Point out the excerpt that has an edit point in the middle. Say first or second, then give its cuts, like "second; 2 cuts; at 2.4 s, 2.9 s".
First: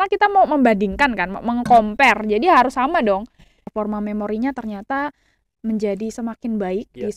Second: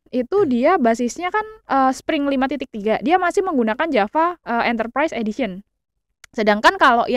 first; 1 cut; at 3.6 s